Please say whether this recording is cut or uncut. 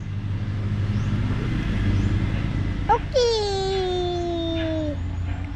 uncut